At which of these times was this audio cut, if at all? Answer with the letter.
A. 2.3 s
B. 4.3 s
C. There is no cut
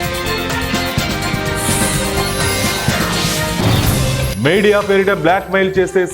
B